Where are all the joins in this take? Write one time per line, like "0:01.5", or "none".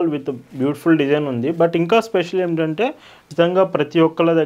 0:03.2